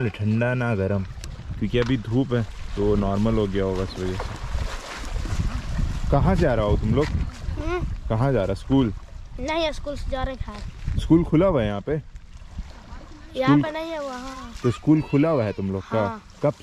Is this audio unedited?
yes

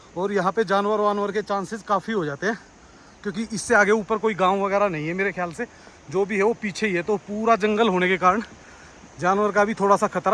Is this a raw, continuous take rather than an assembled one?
yes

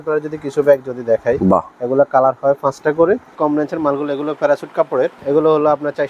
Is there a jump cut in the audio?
yes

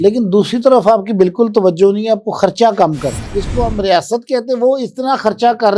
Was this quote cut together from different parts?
yes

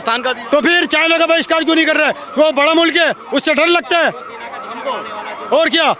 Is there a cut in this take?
no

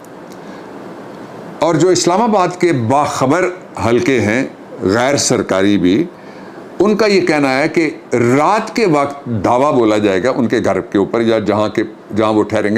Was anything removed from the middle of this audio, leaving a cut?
no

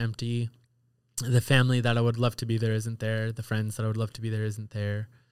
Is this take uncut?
yes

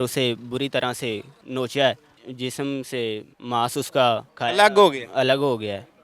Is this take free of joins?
no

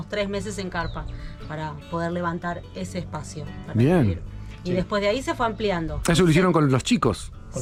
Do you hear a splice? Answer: no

